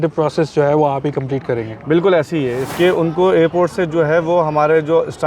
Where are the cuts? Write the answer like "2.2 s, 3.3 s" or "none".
2.6 s